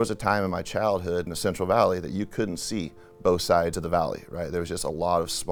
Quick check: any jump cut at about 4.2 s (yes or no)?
no